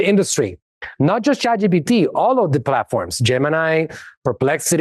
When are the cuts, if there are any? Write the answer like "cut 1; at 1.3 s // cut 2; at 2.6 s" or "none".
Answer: none

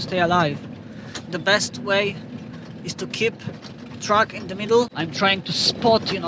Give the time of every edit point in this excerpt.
cut 1; at 4.9 s

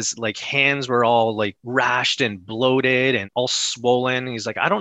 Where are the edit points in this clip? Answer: cut 1; at 1.6 s // cut 2; at 3.3 s

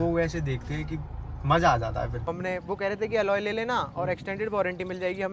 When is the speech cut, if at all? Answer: cut 1; at 2.3 s

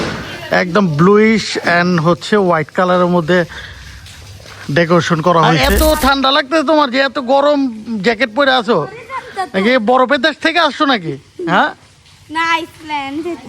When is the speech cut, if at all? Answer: cut 1; at 5.6 s

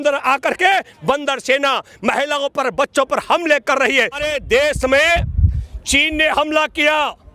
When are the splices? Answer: cut 1; at 4.2 s

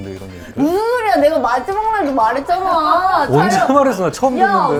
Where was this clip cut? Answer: none

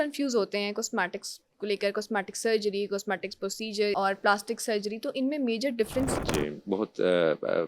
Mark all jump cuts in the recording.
cut 1; at 3.9 s // cut 2; at 6.3 s

